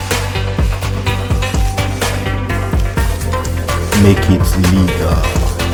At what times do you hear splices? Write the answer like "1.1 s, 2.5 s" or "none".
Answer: none